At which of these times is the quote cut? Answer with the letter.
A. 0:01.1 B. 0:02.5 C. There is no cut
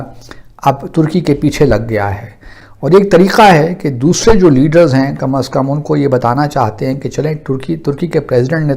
B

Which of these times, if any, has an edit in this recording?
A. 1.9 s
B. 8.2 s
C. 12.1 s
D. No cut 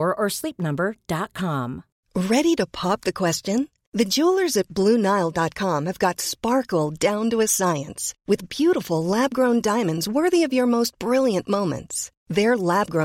A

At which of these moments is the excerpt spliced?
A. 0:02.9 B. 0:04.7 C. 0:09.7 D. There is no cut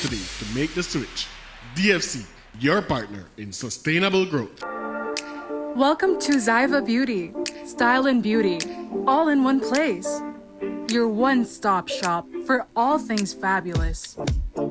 B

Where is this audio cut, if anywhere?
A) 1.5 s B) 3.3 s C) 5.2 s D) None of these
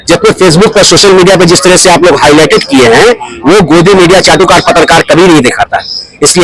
D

